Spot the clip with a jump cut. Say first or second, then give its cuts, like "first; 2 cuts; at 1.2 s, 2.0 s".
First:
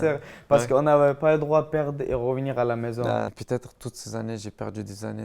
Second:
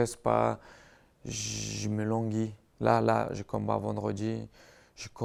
first; 1 cut; at 3.3 s